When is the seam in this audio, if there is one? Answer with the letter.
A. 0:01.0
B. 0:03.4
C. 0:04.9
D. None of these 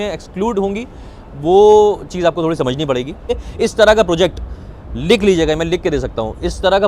B